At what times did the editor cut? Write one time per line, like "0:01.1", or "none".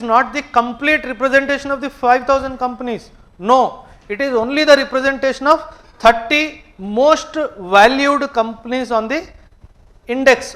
none